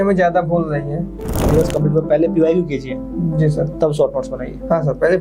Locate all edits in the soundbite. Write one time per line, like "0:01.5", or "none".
0:01.4